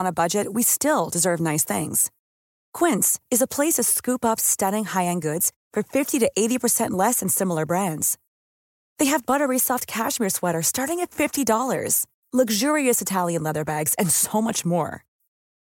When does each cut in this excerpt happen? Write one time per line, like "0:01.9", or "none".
none